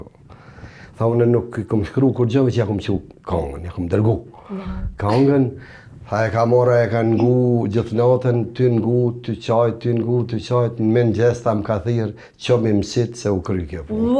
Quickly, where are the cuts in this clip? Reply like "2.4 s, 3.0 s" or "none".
none